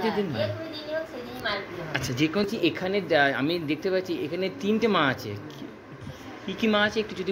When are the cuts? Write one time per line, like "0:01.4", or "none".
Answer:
0:02.4

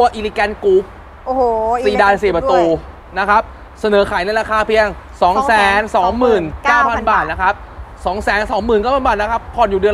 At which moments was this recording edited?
none

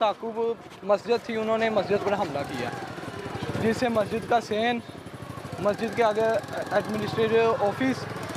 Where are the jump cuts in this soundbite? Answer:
none

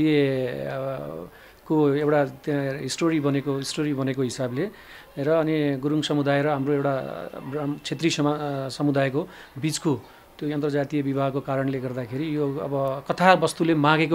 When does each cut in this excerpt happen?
none

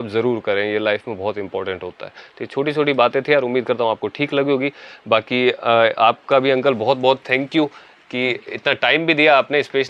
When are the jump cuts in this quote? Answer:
none

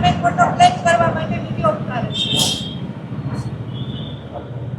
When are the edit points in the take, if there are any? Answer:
none

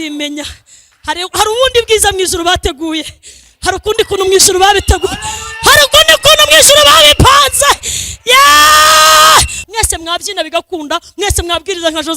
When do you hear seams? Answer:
0:09.6

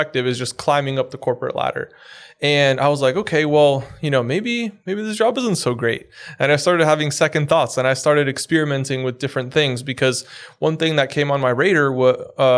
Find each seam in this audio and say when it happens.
none

